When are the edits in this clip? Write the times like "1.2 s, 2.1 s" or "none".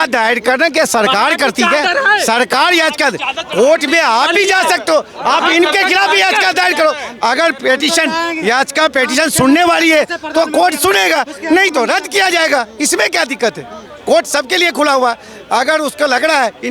none

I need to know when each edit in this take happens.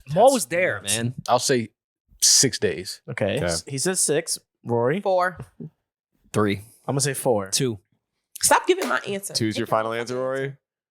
1.2 s

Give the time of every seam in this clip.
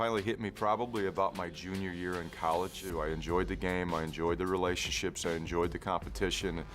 3.0 s

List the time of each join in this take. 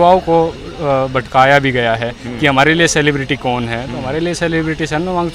none

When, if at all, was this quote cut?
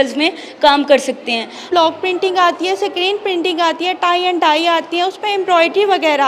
1.6 s

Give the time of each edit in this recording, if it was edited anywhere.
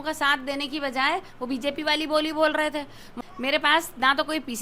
3.0 s

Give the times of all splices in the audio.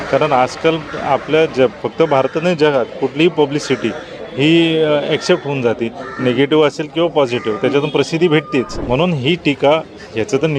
8.8 s

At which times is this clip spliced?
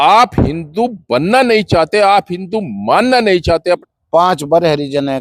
3.9 s

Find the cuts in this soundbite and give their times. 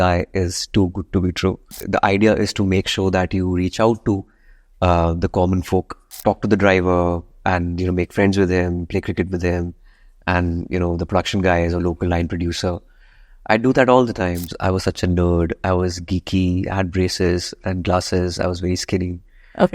1.7 s, 6.0 s, 14.5 s

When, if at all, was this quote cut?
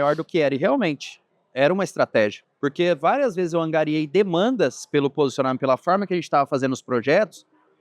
2.4 s

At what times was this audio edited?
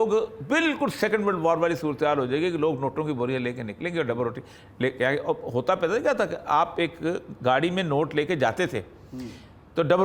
none

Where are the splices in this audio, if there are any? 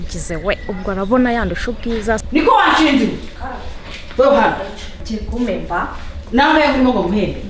2.2 s, 5.0 s

